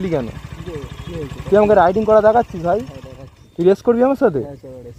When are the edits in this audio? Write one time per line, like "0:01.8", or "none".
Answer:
none